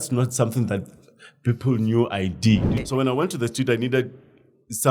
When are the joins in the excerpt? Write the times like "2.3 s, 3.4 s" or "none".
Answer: 2.8 s